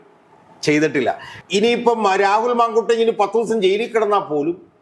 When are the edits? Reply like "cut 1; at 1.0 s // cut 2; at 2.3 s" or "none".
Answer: cut 1; at 1.3 s

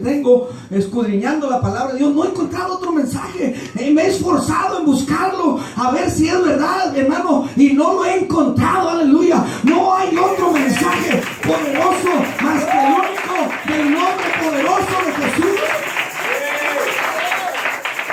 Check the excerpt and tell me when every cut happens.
none

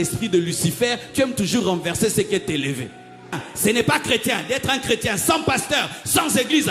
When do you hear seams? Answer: cut 1; at 3.5 s

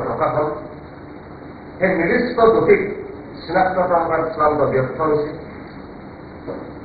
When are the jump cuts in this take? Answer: none

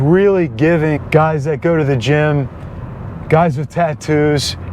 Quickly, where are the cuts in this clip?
cut 1; at 1.0 s

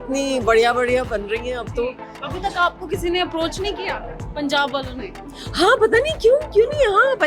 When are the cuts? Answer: cut 1; at 2.2 s

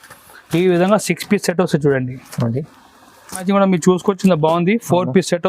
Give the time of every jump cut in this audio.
cut 1; at 3.4 s

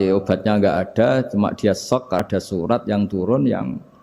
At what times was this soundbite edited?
cut 1; at 2.2 s

